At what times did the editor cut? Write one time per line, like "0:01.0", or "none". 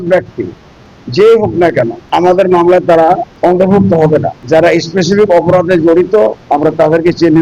0:02.0
0:03.3
0:04.4
0:06.4